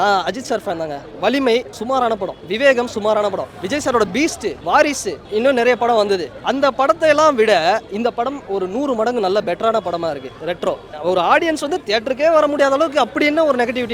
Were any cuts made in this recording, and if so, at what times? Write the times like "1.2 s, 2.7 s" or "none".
2.0 s, 3.5 s, 4.6 s, 5.2 s, 6.4 s, 10.9 s